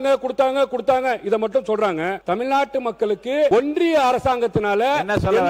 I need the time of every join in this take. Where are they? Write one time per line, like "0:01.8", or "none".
0:02.2
0:03.5